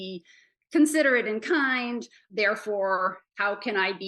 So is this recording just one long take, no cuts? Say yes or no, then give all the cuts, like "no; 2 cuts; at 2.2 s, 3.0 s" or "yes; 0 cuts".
no; 1 cut; at 2.2 s